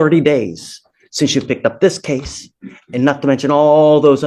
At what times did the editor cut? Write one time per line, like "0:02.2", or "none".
none